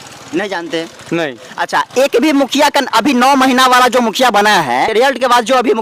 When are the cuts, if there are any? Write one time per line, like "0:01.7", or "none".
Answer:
0:04.9

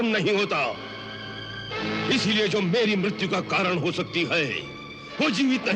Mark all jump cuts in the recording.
none

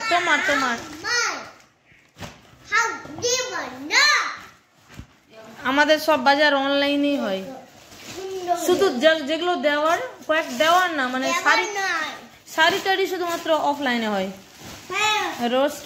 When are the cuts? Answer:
none

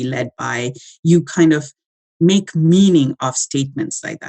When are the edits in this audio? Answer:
none

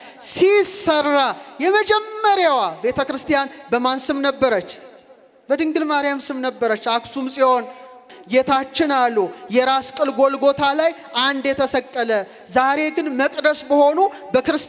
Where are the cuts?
0:08.1

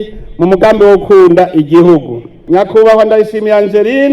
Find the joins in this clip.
0:02.3

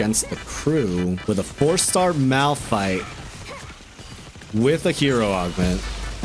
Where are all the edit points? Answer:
0:01.2

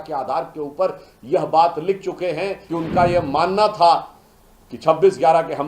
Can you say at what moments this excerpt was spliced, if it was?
0:02.6

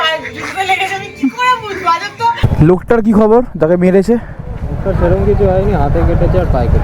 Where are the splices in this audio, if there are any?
0:02.4

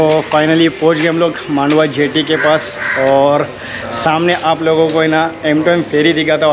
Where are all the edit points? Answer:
none

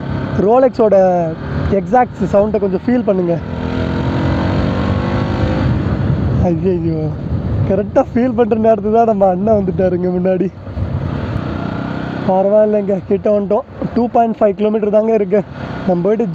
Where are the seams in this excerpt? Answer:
none

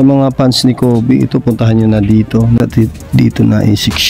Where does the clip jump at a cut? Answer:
0:02.6

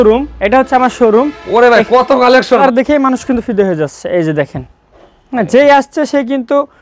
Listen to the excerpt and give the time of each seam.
0:02.6

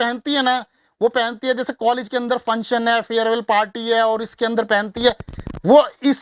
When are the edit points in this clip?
none

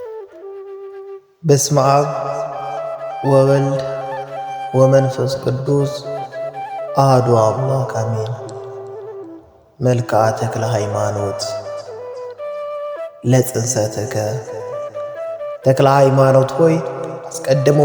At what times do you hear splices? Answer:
0:01.0
0:08.4
0:09.8

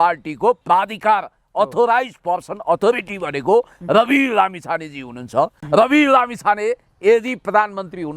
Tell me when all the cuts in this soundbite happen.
0:05.6

